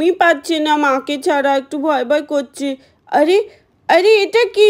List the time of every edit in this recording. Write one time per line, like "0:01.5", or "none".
none